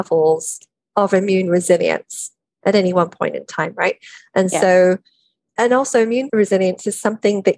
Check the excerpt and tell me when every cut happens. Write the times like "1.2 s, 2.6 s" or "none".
5.5 s, 6.3 s